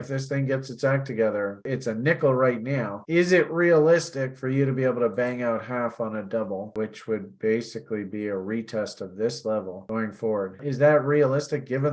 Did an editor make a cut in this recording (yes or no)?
yes